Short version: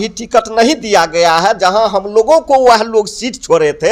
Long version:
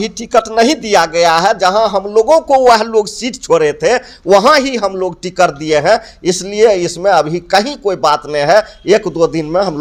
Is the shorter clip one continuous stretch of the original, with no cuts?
yes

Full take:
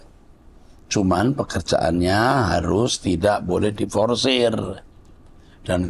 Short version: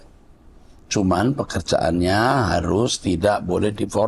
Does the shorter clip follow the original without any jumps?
yes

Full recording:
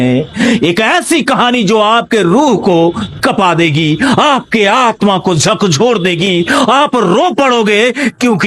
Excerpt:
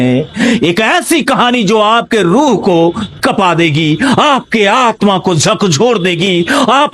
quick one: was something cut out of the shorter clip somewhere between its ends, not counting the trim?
no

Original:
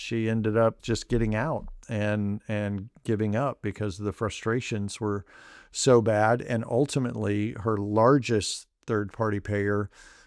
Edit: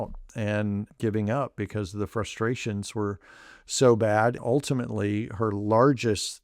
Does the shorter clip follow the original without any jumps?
no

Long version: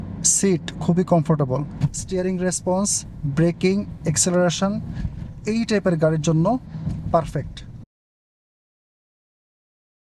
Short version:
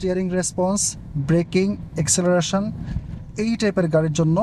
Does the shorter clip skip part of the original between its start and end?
no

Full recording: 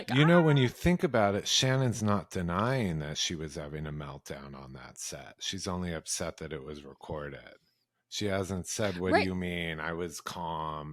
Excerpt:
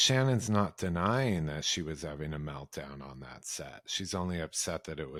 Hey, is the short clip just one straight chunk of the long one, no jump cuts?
yes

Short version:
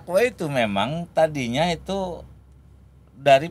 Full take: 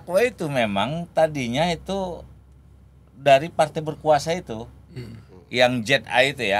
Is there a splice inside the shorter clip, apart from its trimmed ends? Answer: no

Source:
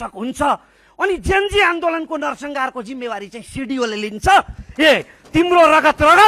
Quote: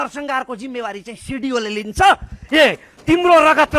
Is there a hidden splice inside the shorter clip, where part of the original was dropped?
no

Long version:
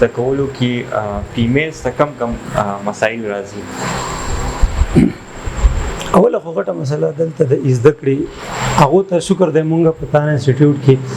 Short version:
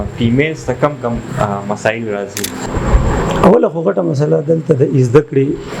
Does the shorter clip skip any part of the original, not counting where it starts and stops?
yes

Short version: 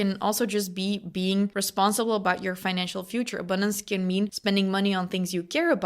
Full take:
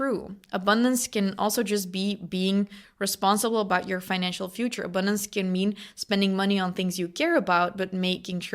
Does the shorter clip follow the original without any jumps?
no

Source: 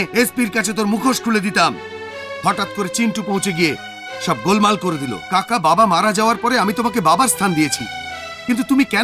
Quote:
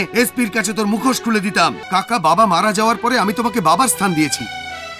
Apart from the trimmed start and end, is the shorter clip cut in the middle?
yes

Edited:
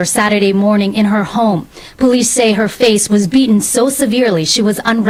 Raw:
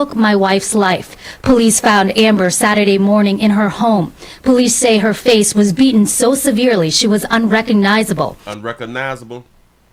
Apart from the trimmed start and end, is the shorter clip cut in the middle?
no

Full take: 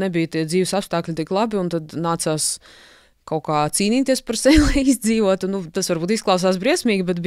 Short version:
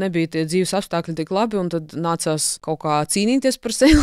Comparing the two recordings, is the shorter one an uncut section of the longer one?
no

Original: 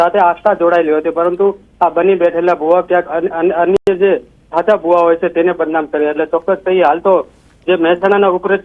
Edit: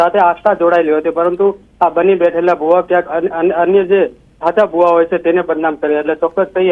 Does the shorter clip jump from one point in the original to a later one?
yes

